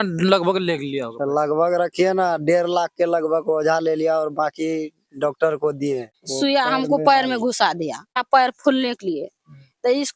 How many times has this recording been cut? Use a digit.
1